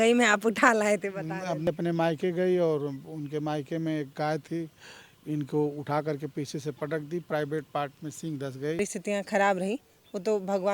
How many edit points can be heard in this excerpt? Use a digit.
2